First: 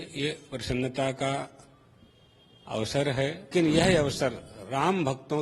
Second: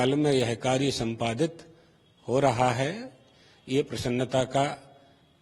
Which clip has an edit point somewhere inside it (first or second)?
first